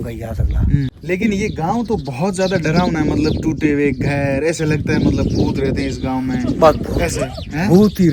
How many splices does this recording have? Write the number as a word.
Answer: one